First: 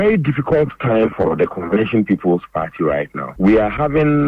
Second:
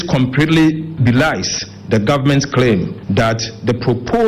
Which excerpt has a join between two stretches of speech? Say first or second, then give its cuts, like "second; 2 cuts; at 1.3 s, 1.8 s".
second; 2 cuts; at 1.0 s, 3.0 s